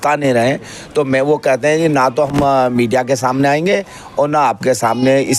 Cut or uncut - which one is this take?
uncut